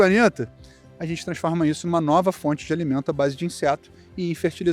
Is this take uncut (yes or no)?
yes